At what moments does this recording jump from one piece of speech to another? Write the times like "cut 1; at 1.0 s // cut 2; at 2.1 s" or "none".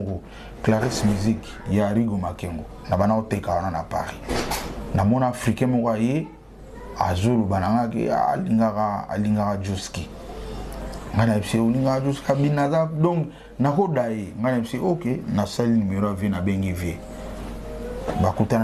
none